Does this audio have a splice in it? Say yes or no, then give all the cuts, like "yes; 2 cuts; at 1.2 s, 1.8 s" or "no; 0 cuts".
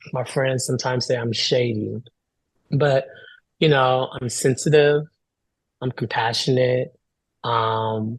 no; 0 cuts